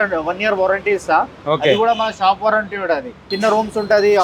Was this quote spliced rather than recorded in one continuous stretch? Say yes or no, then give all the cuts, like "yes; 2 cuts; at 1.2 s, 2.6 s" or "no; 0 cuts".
yes; 1 cut; at 3.2 s